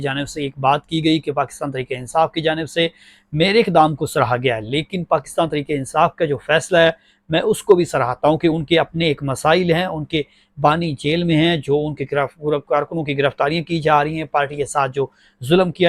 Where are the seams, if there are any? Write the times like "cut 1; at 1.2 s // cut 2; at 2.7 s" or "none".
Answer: none